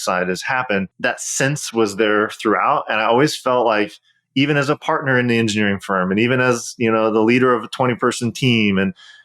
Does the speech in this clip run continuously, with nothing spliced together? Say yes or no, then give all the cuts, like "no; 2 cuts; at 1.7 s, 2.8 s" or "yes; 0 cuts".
no; 1 cut; at 0.9 s